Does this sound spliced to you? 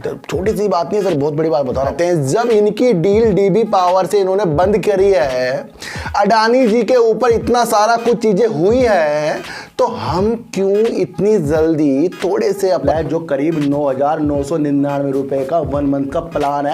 yes; 2 cuts; at 1.9 s, 12.9 s

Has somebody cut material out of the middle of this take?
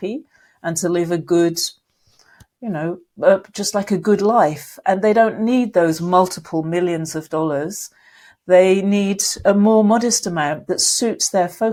no; 0 cuts

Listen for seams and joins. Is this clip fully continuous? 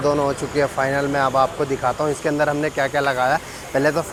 yes; 0 cuts

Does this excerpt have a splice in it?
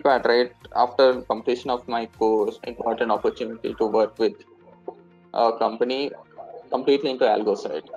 yes; 2 cuts; at 1.2 s, 2.6 s

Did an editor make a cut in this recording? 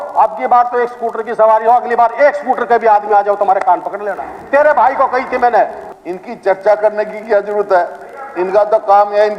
yes; 1 cut; at 5.8 s

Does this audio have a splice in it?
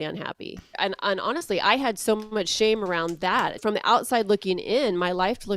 yes; 2 cuts; at 0.8 s, 3.6 s

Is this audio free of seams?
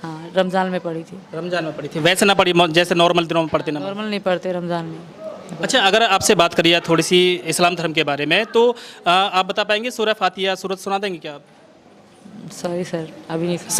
yes; 0 cuts

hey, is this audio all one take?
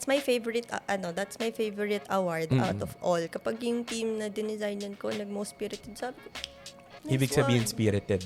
yes; 0 cuts

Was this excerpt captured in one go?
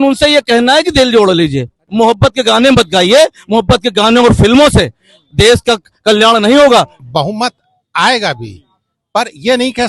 no; 2 cuts; at 1.8 s, 7.0 s

